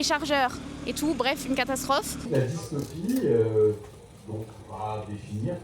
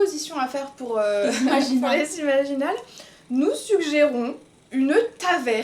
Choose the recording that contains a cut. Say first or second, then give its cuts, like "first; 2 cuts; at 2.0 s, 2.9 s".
first; 1 cut; at 2.3 s